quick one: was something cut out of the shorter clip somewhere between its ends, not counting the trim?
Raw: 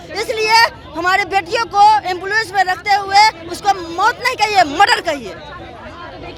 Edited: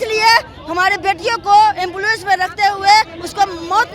no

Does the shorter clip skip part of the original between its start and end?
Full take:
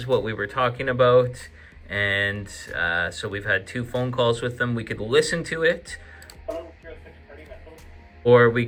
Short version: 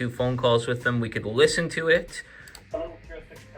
no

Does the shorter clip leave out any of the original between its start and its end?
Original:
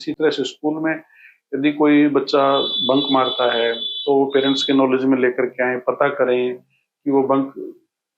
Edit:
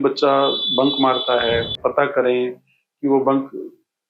yes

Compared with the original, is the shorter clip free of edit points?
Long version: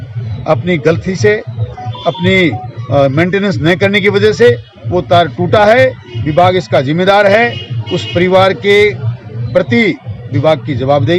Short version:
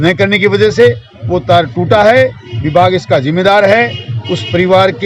yes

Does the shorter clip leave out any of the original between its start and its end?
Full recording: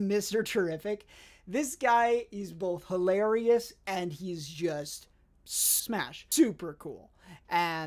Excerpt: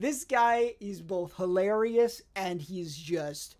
no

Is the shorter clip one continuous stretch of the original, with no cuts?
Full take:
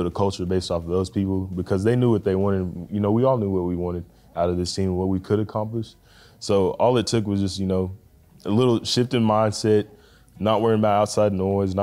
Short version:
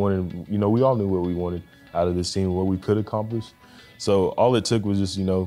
yes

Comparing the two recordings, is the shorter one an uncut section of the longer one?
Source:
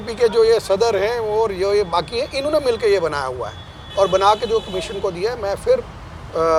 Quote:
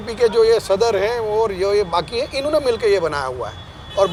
yes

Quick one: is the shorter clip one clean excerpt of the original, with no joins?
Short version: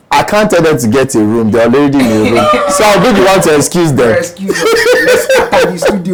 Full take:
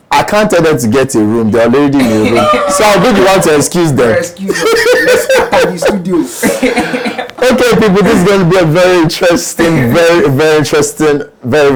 yes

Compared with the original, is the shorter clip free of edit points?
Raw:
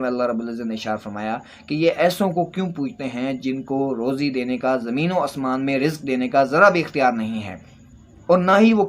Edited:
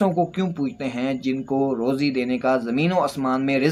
yes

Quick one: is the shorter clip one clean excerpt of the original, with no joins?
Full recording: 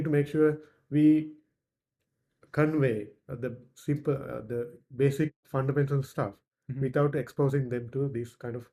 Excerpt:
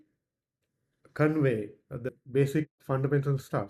no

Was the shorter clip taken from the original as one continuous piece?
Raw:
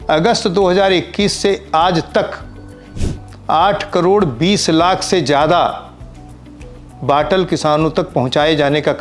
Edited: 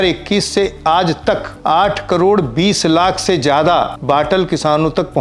no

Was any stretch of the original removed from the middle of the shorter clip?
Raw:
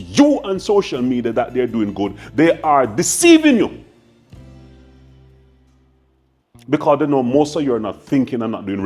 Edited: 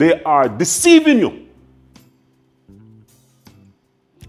no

